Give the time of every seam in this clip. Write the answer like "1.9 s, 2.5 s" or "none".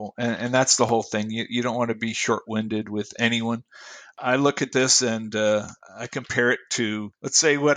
4.2 s